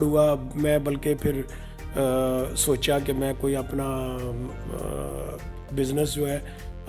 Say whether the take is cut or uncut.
uncut